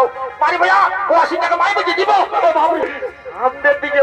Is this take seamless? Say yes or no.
no